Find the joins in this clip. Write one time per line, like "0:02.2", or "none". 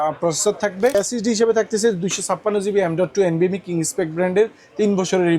0:00.9